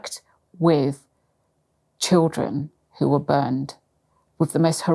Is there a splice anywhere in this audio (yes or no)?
no